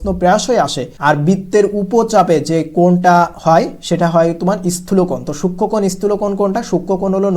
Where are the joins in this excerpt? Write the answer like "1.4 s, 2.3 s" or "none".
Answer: 0.9 s